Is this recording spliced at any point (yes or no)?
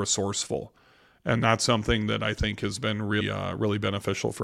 no